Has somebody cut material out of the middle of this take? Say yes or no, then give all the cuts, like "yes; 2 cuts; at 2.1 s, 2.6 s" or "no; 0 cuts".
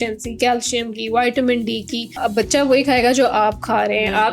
yes; 1 cut; at 2.2 s